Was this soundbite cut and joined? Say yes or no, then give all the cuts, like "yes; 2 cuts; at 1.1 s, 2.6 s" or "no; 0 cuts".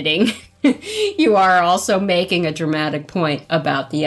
no; 0 cuts